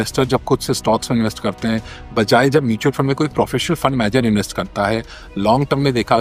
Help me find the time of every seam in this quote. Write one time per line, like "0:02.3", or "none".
none